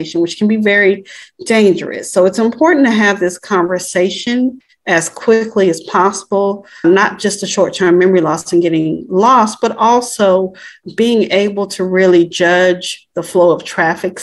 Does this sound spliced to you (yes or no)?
yes